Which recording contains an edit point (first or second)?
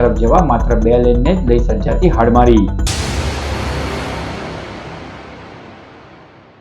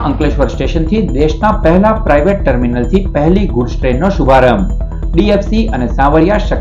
first